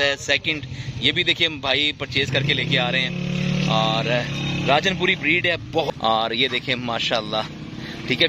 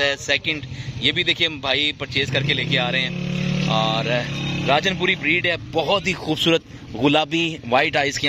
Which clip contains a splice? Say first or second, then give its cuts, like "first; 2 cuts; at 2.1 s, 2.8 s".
first; 1 cut; at 5.9 s